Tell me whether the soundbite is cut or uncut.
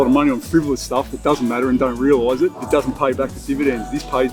uncut